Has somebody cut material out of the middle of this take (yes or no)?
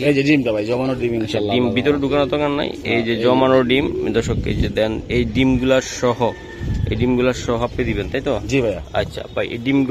no